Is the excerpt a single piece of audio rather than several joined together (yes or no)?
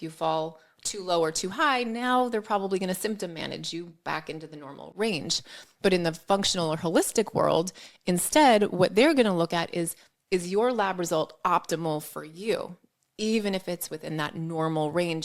no